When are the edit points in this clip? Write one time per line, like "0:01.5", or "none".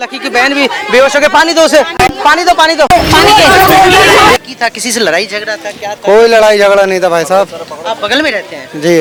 none